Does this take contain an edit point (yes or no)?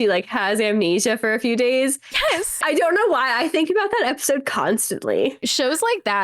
yes